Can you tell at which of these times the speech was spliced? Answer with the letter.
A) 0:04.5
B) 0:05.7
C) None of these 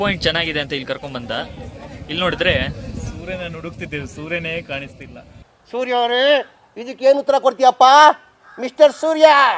C